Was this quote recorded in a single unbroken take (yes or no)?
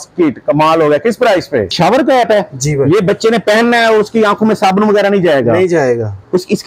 no